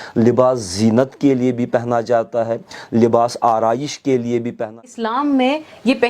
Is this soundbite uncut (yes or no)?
no